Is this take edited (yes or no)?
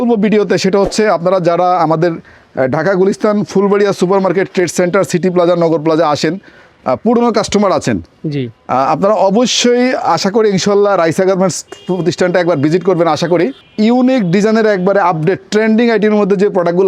yes